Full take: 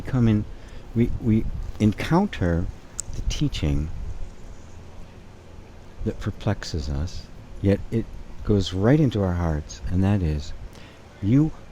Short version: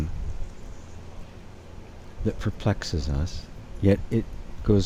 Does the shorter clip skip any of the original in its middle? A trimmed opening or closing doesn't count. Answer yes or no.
no